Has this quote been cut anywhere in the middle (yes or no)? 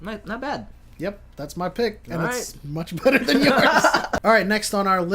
no